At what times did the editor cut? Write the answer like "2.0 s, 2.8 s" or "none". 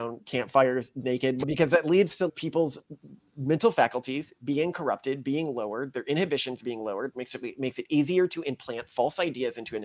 1.4 s, 2.3 s